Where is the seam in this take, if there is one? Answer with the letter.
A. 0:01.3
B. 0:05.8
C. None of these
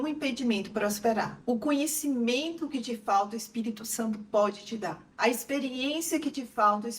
A